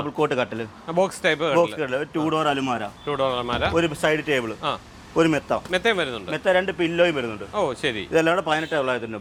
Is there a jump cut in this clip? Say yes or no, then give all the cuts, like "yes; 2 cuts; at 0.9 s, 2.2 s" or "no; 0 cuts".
no; 0 cuts